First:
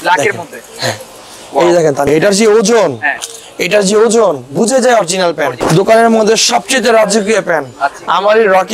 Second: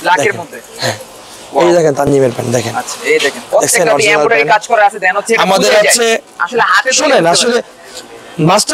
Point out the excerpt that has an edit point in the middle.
first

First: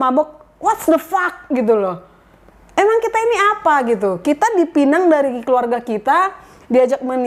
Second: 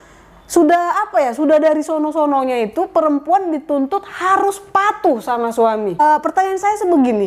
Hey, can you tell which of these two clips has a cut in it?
second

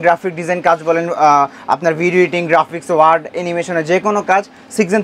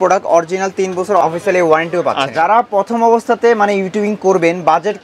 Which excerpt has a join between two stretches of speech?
second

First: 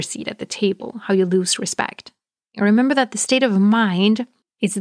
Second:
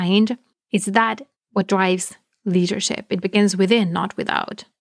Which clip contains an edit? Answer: first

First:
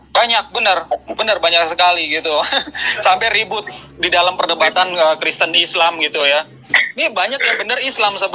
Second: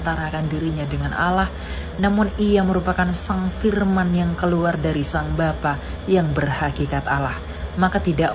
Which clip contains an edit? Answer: second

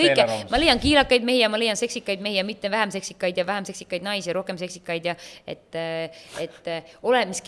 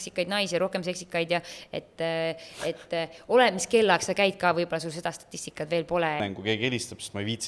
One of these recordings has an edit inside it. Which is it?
second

